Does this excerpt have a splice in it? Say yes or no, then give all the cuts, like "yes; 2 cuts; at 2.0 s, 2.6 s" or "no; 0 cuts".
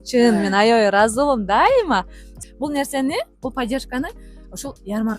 yes; 1 cut; at 2.3 s